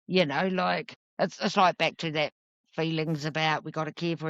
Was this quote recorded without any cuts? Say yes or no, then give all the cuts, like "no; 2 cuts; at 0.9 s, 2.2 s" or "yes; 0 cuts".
no; 1 cut; at 1.0 s